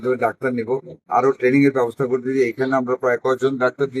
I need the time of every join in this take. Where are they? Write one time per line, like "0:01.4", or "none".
0:00.9